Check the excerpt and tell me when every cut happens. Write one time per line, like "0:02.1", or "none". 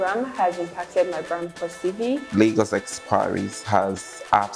0:02.3